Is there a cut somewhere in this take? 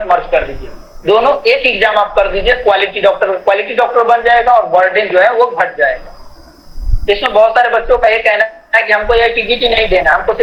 no; 0 cuts

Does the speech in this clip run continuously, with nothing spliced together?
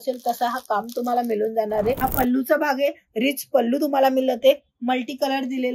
no; 1 cut; at 2.0 s

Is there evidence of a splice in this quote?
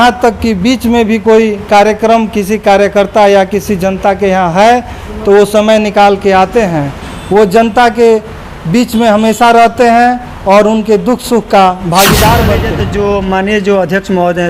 yes; 1 cut; at 12.8 s

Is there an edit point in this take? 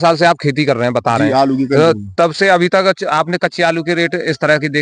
no; 0 cuts

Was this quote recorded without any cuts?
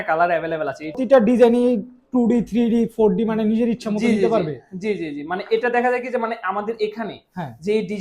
no; 1 cut; at 1.0 s

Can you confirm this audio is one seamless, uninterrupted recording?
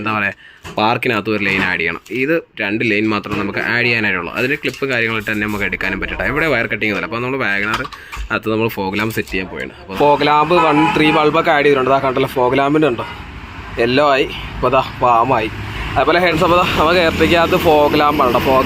no; 2 cuts; at 9.8 s, 16.3 s

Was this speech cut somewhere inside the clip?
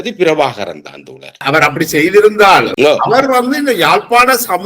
yes; 2 cuts; at 1.5 s, 2.7 s

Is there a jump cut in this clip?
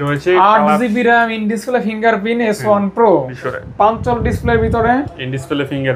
yes; 1 cut; at 3.3 s

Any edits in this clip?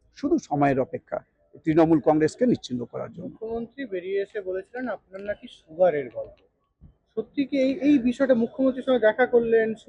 no; 0 cuts

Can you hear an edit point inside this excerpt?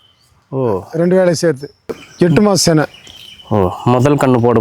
yes; 1 cut; at 2.0 s

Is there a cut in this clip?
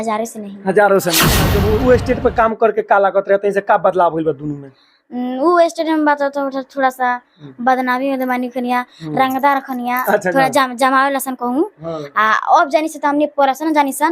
yes; 1 cut; at 1.5 s

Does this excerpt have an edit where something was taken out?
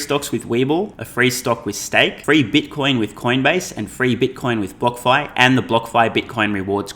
yes; 2 cuts; at 1.0 s, 2.2 s

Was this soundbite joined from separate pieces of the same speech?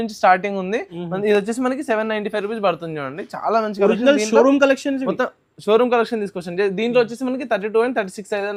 no; 0 cuts

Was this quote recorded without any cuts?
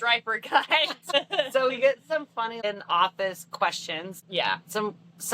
no; 3 cuts; at 1.1 s, 2.6 s, 4.2 s

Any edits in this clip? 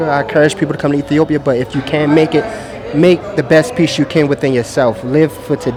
no; 0 cuts

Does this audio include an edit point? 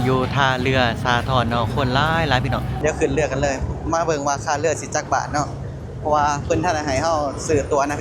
yes; 1 cut; at 2.8 s

